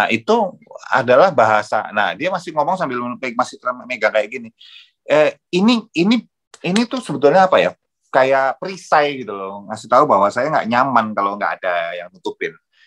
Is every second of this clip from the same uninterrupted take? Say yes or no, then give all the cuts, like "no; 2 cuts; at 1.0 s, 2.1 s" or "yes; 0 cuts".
yes; 0 cuts